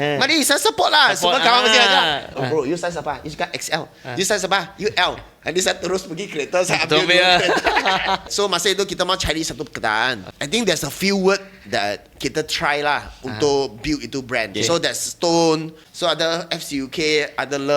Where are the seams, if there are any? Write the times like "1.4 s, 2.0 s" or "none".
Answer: 2.3 s, 8.3 s, 10.3 s, 14.5 s, 15.8 s

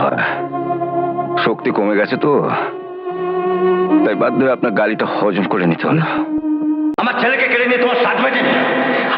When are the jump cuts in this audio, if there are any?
6.9 s

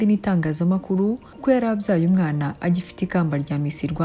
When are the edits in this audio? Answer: 1.3 s

